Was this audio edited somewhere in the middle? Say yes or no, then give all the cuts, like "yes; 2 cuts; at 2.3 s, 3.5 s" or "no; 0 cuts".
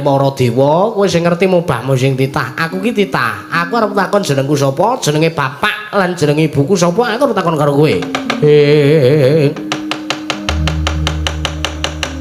no; 0 cuts